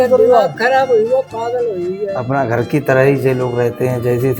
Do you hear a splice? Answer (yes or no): yes